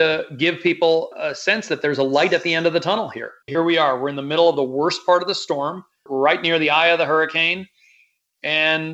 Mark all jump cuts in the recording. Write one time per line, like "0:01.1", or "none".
0:03.4

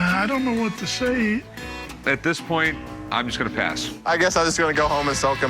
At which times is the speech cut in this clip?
0:04.0

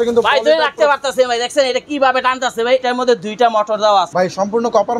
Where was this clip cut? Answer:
0:02.8
0:04.1

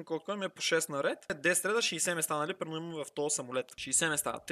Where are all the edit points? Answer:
0:01.3

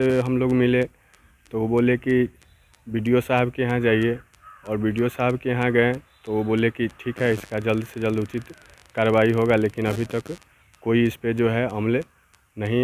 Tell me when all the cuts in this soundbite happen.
none

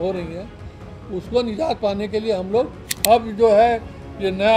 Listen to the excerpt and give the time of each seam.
0:02.8

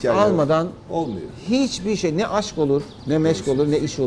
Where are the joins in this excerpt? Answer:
0:02.9

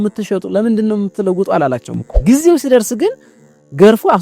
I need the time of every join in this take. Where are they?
0:02.1

